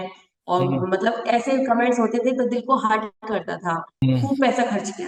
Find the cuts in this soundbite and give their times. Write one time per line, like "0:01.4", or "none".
0:04.0